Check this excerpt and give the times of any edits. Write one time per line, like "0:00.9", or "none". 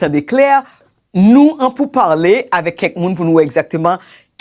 0:00.9